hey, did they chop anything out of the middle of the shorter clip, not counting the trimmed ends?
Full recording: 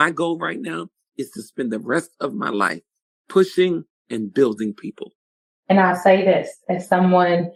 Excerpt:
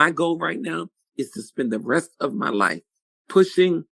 no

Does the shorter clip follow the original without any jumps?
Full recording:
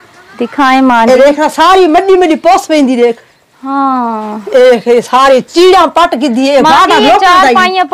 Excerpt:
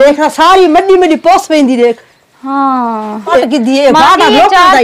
no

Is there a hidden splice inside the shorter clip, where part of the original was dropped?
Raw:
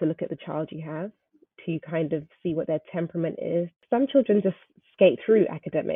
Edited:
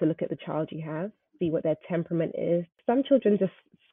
yes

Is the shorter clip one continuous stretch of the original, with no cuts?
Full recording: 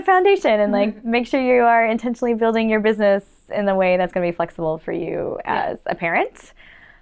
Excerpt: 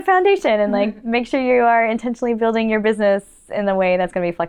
yes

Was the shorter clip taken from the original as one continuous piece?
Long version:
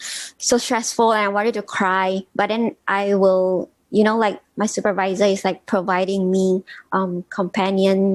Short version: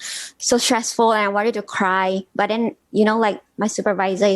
no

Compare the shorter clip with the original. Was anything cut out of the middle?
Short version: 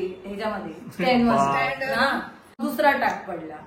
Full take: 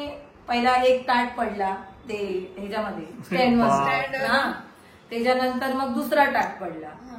yes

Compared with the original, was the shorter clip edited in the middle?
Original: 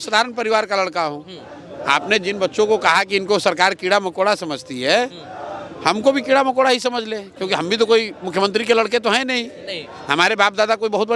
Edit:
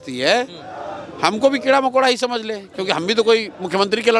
no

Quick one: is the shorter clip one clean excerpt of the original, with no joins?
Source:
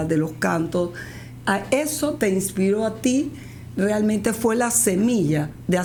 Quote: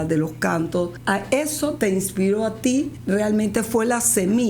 no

